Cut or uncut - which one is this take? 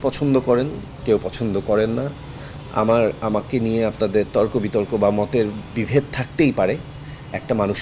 uncut